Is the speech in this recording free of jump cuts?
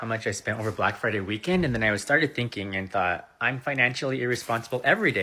yes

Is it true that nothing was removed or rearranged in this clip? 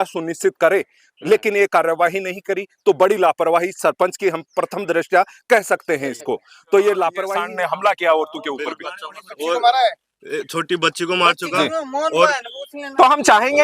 no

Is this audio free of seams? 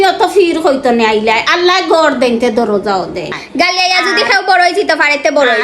no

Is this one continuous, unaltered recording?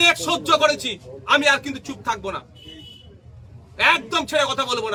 yes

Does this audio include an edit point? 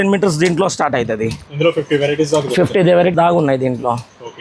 yes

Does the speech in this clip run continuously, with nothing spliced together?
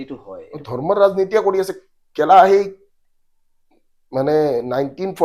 yes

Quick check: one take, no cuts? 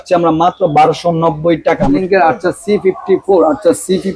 no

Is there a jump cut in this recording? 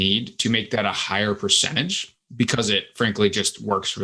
no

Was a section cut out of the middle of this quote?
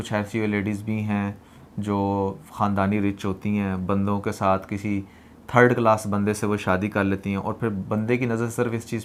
no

